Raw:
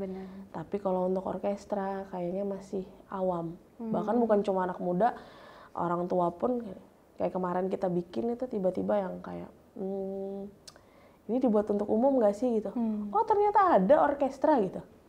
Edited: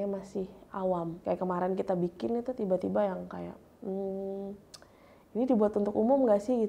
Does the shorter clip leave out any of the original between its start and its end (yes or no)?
yes